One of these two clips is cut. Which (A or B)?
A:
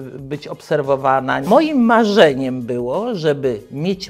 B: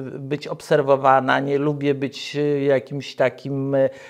A